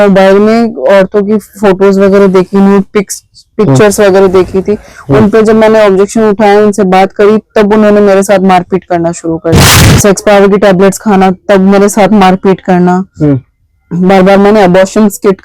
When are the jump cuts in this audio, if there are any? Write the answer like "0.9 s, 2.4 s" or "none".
9.6 s